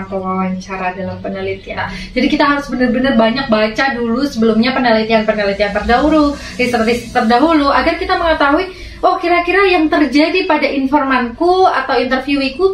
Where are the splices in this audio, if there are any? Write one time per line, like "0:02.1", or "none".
0:01.8